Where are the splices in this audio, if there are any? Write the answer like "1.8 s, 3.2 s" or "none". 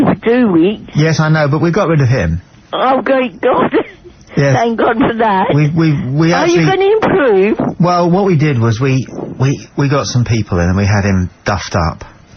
11.2 s